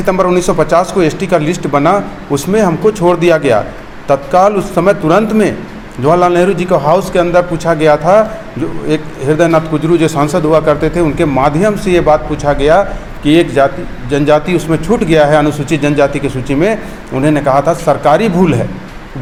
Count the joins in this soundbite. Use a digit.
0